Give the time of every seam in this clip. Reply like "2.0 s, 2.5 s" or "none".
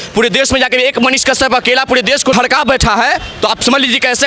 2.3 s